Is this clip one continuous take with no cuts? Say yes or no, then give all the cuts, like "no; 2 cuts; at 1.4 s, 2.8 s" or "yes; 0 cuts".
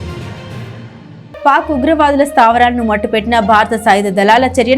yes; 0 cuts